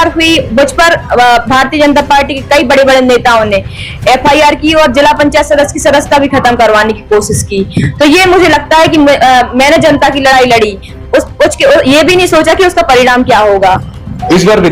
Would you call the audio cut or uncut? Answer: uncut